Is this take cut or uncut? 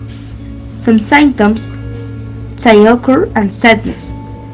uncut